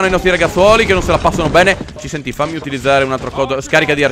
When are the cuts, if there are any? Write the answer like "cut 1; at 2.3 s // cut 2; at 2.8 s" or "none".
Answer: cut 1; at 2.0 s